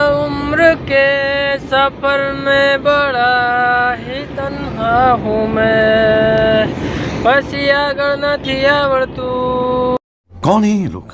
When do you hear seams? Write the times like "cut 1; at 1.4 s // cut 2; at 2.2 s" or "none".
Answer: none